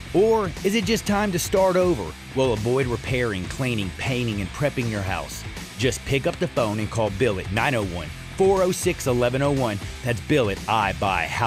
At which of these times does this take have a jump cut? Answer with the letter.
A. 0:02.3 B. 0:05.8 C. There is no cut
C